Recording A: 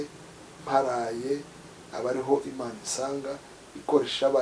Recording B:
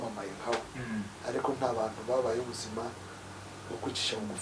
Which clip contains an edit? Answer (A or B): B